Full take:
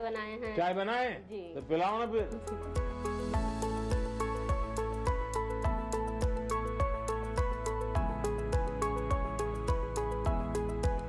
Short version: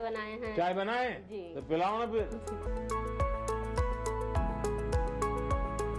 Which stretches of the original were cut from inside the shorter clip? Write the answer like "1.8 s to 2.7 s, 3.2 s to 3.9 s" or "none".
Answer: 2.7 s to 6.3 s